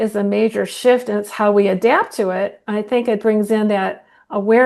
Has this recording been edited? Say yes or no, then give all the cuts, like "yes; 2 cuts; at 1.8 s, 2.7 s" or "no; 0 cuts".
no; 0 cuts